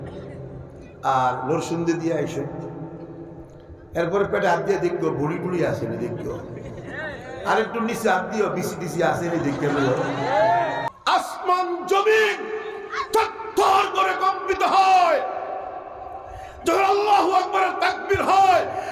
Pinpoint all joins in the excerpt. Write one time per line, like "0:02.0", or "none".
0:10.9